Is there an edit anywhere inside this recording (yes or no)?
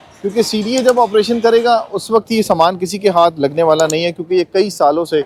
no